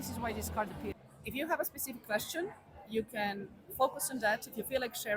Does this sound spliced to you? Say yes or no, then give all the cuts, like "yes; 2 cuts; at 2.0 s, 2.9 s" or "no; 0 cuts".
yes; 1 cut; at 0.9 s